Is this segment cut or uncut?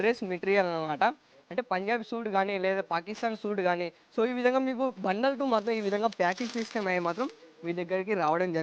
uncut